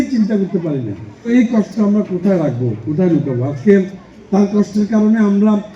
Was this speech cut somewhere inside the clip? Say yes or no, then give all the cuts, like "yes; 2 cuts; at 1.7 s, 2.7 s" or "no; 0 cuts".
yes; 1 cut; at 1.2 s